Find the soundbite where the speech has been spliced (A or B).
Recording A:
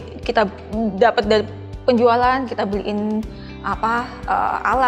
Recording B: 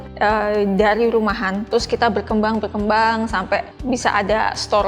B